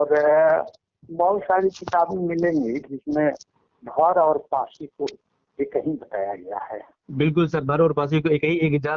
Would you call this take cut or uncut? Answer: uncut